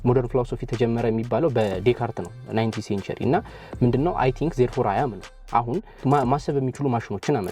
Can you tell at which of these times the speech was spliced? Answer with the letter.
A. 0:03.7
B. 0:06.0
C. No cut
B